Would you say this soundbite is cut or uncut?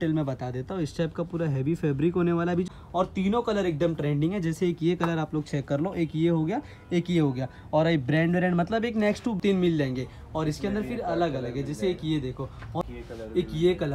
cut